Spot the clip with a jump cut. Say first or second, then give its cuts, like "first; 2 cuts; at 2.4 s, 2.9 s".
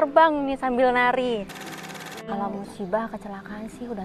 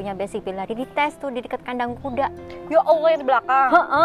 first; 1 cut; at 1.6 s